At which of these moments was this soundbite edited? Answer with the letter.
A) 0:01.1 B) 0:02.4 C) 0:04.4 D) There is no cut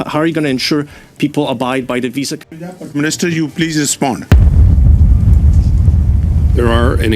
B